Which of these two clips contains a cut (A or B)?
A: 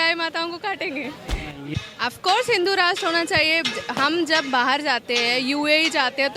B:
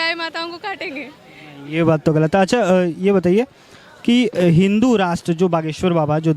A